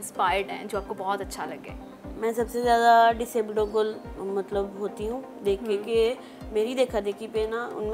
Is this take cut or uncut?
uncut